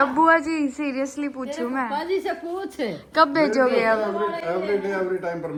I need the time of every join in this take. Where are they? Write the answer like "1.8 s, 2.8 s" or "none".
none